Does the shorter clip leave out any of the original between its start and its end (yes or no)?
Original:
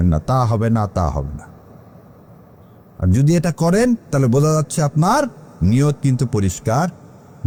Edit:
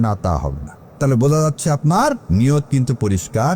yes